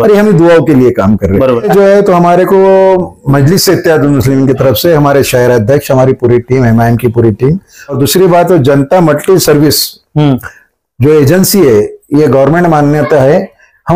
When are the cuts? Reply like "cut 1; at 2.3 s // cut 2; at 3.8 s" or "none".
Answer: cut 1; at 1.7 s // cut 2; at 8.0 s